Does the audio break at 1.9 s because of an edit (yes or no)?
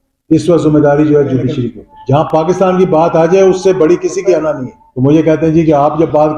yes